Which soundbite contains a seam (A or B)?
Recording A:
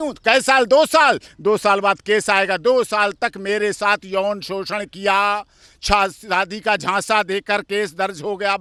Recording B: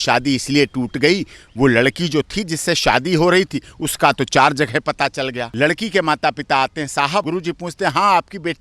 B